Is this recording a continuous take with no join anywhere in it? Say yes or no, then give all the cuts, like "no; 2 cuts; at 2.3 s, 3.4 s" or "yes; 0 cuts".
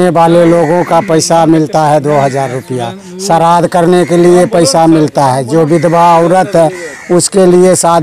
yes; 0 cuts